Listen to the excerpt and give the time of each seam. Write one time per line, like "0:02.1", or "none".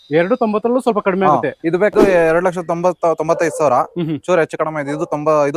0:01.9